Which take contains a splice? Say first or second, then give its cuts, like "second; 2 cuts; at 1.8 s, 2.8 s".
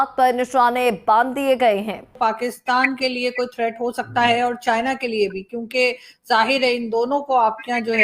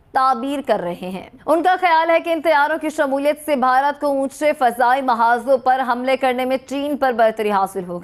first; 1 cut; at 2.1 s